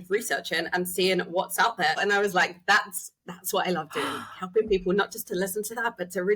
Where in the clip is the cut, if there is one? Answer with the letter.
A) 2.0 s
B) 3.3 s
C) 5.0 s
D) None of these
A